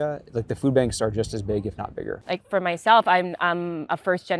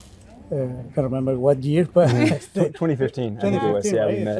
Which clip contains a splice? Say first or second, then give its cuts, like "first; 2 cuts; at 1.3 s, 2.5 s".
first; 1 cut; at 2.2 s